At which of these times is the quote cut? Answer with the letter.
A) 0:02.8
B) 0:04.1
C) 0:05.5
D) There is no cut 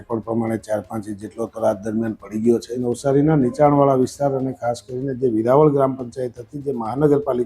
A